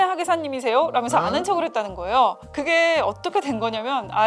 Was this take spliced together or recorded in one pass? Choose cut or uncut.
uncut